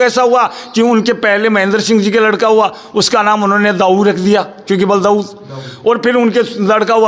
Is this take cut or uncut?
uncut